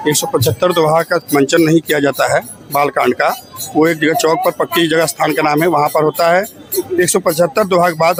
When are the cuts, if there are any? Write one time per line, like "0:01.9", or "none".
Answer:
none